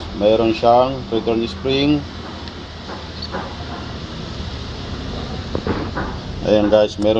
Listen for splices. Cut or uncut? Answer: uncut